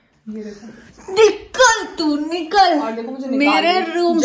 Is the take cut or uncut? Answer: uncut